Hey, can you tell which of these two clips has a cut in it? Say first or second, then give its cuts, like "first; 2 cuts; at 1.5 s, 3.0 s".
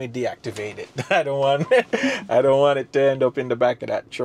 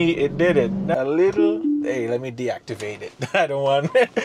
second; 1 cut; at 0.9 s